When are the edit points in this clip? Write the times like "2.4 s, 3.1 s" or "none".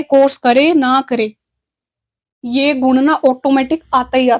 none